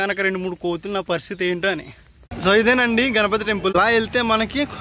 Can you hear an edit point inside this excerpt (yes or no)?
yes